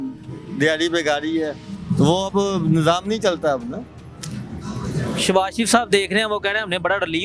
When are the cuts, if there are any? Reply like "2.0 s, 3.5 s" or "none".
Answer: none